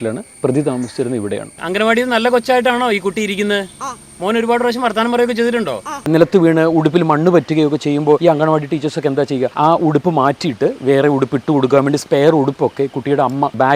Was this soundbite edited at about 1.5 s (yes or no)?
yes